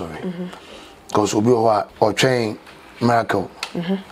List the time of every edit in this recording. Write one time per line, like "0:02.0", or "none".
0:01.9